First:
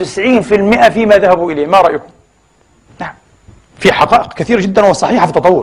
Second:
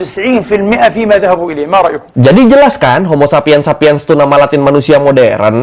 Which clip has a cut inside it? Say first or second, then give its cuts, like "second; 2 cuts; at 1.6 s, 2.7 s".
second; 1 cut; at 2.1 s